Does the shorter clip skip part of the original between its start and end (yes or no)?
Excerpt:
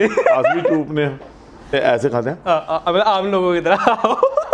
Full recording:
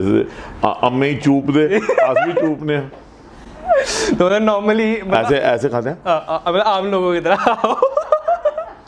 yes